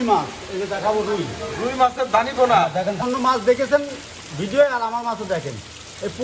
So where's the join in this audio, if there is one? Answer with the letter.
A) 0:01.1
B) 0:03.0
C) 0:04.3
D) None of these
B